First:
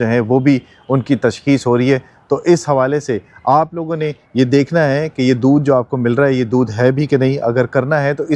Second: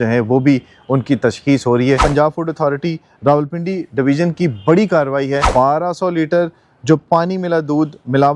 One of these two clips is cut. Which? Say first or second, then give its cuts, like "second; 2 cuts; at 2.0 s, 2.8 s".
second; 2 cuts; at 2.0 s, 5.5 s